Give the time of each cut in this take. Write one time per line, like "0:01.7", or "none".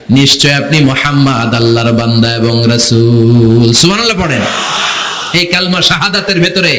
none